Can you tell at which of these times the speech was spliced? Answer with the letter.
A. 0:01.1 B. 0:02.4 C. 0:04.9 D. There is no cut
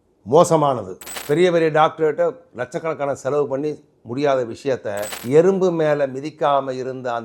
A